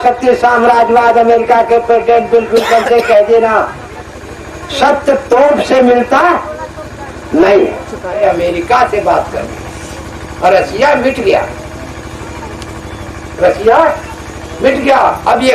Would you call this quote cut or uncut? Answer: cut